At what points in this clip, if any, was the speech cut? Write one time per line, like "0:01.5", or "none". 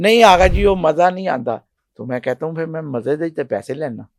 none